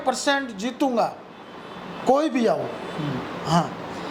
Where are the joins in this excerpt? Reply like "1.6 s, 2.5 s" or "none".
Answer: none